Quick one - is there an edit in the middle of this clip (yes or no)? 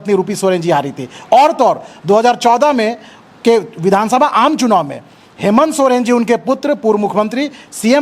no